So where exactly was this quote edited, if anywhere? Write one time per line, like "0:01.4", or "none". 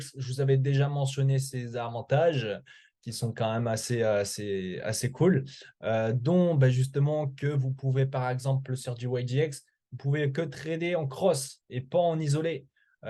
none